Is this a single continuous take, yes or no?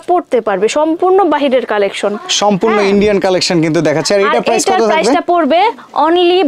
yes